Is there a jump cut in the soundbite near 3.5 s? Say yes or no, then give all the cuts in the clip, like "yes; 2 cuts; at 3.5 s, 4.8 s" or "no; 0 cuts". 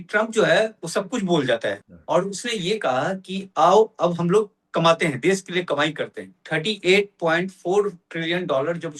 no; 2 cuts; at 1.9 s, 6.4 s